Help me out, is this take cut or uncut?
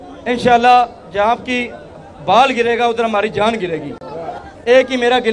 cut